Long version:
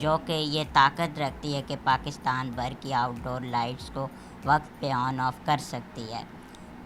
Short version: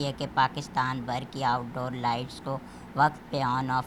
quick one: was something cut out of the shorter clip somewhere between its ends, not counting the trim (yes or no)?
no